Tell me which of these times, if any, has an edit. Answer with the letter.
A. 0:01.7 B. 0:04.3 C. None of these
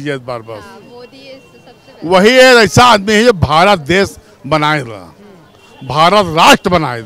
C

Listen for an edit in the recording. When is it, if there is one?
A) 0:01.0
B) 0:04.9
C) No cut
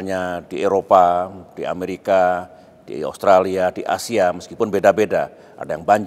A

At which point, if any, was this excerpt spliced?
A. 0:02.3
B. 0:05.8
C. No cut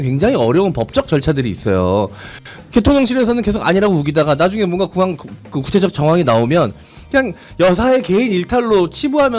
C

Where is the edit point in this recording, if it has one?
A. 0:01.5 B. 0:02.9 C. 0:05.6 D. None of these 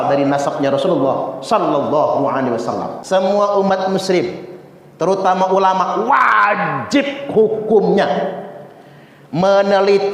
B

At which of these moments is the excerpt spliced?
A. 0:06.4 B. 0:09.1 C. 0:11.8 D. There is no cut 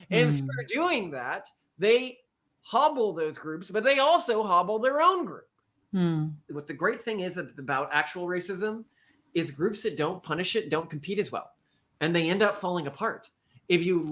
A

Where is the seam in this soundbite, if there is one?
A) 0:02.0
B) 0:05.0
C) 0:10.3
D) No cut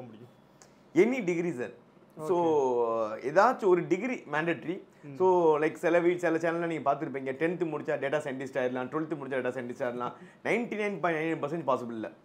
D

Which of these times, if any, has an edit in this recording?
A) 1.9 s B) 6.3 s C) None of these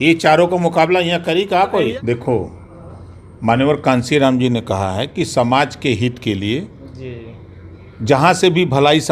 A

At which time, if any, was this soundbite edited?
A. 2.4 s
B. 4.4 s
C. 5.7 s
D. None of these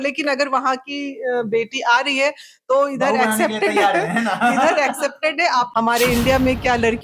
C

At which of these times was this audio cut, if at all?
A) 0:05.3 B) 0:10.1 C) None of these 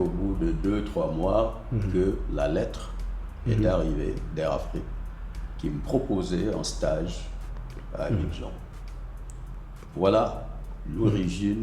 C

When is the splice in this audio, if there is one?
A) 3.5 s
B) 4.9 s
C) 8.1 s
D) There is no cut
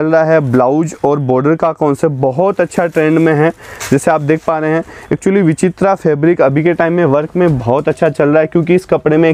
D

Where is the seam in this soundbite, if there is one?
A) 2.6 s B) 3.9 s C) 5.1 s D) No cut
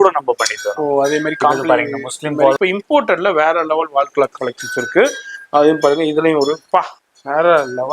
A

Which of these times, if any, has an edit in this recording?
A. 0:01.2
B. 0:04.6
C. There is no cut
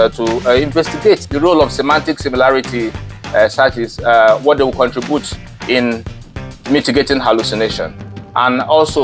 A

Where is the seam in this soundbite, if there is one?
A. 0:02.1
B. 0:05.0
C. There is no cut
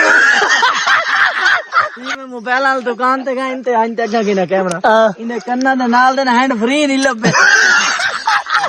A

